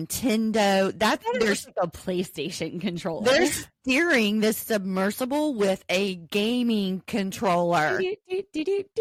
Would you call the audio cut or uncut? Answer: uncut